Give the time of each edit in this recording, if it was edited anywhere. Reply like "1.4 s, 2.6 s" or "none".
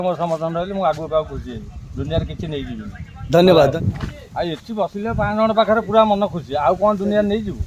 3.7 s